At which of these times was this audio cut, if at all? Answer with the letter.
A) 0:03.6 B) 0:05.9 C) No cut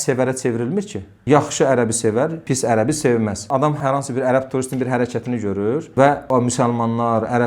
A